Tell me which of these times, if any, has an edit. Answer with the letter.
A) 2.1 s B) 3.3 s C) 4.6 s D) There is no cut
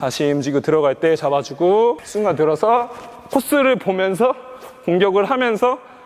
A